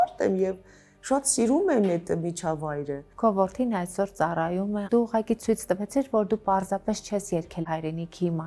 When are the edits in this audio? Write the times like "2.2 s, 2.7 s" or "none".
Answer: 3.0 s, 4.8 s, 7.6 s